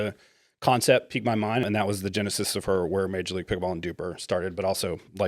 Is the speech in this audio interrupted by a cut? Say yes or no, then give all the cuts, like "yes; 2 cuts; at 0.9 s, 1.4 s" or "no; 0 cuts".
yes; 1 cut; at 1.6 s